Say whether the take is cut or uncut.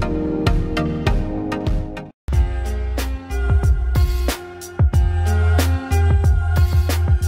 cut